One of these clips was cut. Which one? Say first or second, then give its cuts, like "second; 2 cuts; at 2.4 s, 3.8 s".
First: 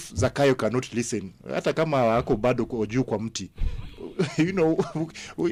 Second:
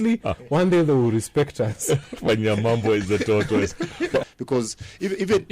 second; 1 cut; at 4.2 s